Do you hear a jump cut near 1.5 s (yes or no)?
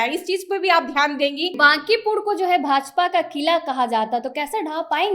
yes